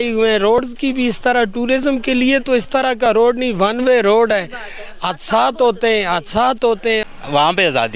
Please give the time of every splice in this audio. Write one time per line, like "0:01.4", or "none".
0:07.0